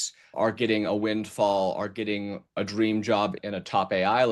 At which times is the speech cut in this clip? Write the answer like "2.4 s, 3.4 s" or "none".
2.6 s, 3.4 s